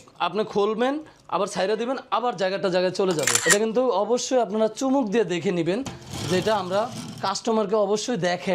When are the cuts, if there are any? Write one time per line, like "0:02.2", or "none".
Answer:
0:03.4